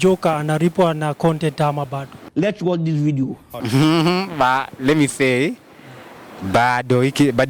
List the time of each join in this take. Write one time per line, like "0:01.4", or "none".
none